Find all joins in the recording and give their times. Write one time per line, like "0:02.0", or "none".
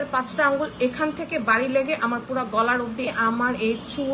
0:03.1